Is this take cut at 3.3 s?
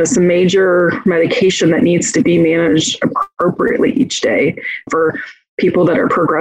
no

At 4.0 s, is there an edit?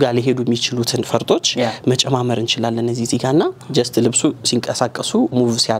no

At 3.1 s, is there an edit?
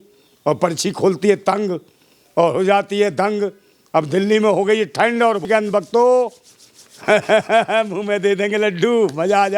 no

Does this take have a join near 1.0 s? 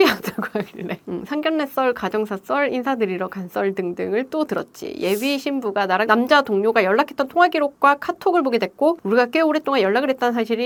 no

